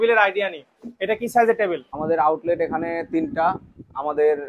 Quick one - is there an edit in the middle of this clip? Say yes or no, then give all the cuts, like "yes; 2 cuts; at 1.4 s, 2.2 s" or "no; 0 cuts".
yes; 1 cut; at 1.9 s